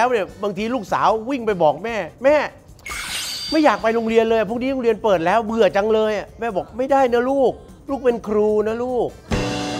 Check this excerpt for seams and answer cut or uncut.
uncut